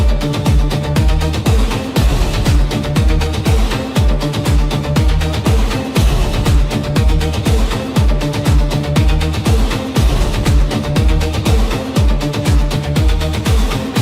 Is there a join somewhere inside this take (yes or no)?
no